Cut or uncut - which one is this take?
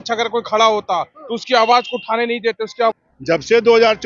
cut